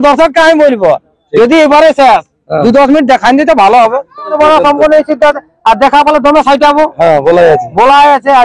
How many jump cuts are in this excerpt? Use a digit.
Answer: 1